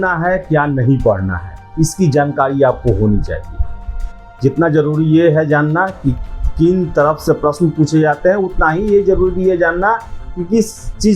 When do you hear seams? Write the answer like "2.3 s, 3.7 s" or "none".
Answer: none